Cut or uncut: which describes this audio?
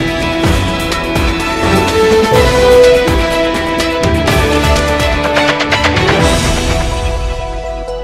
uncut